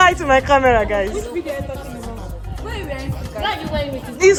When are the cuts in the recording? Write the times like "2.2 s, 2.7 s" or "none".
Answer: none